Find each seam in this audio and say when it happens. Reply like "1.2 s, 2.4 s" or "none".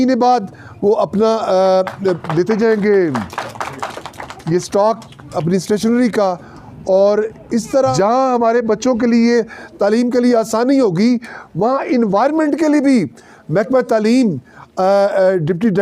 7.9 s